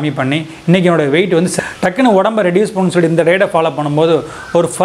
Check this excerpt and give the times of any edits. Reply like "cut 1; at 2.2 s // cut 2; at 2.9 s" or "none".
cut 1; at 1.5 s